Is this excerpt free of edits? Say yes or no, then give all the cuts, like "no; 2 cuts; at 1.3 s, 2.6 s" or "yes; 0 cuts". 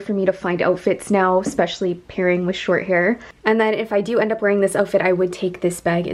yes; 0 cuts